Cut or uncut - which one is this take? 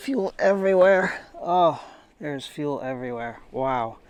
uncut